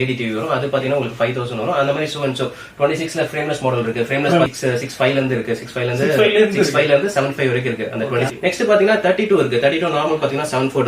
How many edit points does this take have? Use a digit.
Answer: 2